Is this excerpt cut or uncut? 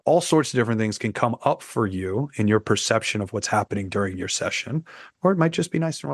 uncut